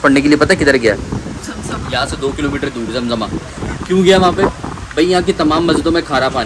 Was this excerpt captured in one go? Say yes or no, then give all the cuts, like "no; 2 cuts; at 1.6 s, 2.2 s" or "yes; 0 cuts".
yes; 0 cuts